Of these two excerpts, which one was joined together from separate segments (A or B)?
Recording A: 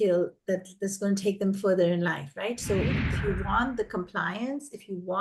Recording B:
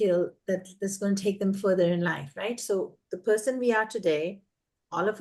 A